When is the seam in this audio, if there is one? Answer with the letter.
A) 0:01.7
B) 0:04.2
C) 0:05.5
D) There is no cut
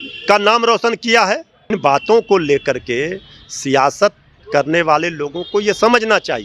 A